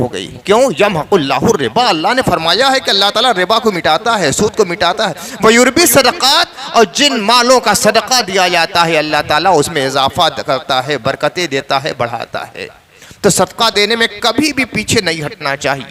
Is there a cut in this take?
no; 0 cuts

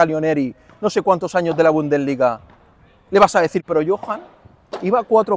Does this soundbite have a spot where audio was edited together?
yes; 1 cut; at 3.6 s

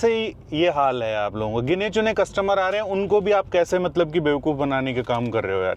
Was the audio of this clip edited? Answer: no; 0 cuts

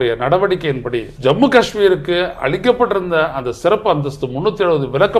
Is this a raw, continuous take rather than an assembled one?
no; 1 cut; at 1.1 s

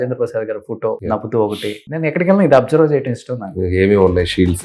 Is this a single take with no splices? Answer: no; 2 cuts; at 1.0 s, 1.8 s

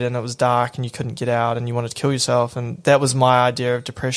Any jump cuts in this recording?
no; 0 cuts

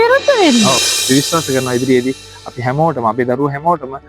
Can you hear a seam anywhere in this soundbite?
yes; 1 cut; at 0.9 s

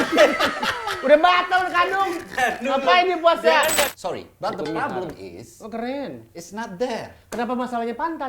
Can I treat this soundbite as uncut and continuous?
no; 1 cut; at 3.9 s

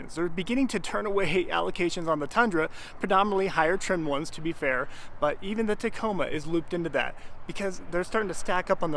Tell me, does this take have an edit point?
no; 0 cuts

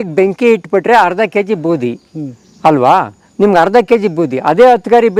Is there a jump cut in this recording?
no; 0 cuts

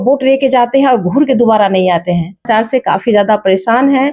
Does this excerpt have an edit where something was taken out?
yes; 1 cut; at 2.5 s

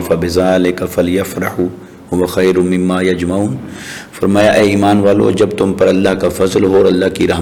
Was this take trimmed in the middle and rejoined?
no; 0 cuts

